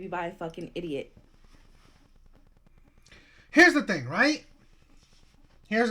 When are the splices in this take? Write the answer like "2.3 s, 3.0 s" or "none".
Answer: none